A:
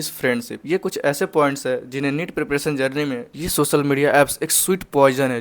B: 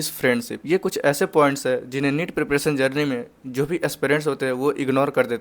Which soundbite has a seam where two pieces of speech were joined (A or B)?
A